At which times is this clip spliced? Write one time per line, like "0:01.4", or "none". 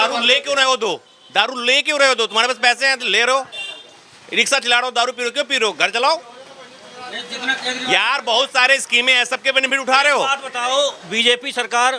none

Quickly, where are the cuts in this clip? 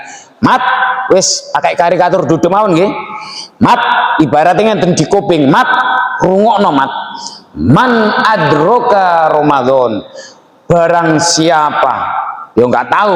none

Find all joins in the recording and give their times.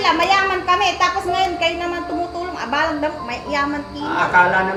none

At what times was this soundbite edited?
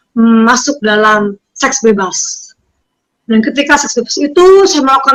none

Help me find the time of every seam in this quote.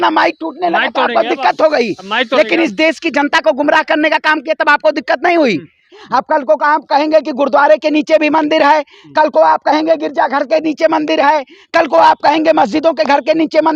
0:05.9

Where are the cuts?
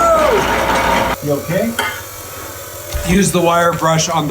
0:01.1

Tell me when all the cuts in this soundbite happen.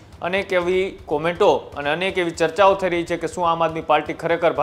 none

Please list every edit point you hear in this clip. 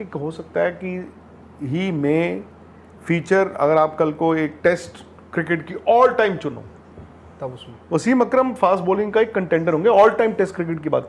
none

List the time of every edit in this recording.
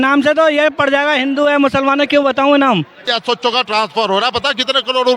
0:03.1

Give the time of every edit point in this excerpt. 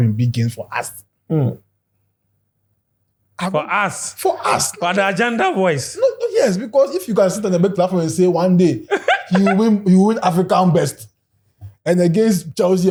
none

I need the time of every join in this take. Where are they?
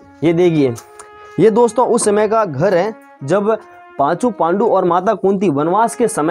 none

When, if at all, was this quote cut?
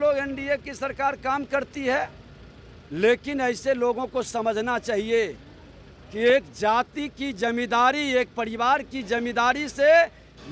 none

